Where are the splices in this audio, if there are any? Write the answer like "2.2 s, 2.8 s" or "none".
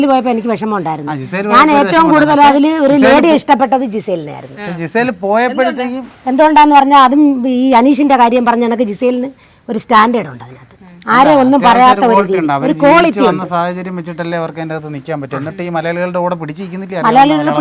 none

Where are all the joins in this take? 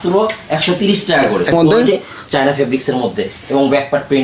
1.5 s

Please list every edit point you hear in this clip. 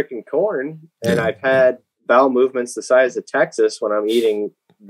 1.9 s

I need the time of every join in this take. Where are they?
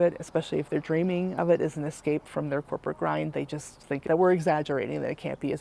none

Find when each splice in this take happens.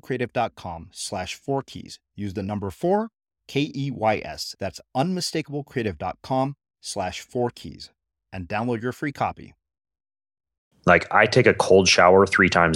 10.6 s

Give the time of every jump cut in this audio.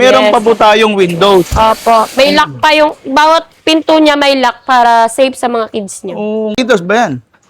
6.6 s

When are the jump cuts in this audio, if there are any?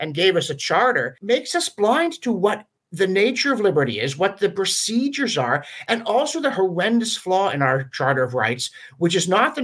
1.2 s

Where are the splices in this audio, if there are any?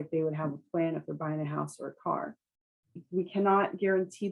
3.0 s

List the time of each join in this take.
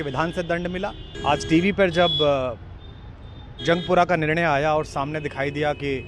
1.1 s

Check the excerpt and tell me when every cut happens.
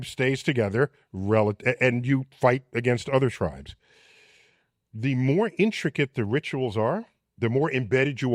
none

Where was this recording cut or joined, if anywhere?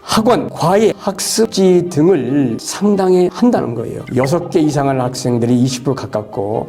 none

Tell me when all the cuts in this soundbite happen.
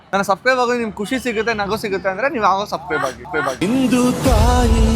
3.2 s

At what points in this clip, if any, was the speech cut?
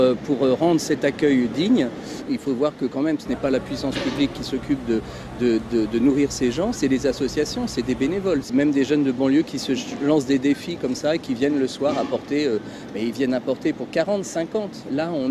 7.2 s

